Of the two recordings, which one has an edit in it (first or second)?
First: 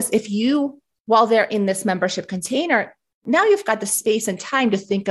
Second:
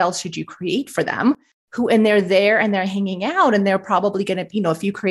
second